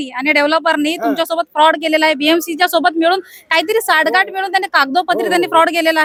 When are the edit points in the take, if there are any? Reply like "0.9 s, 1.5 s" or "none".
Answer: none